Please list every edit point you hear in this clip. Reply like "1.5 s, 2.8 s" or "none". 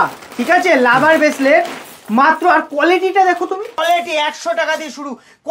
3.8 s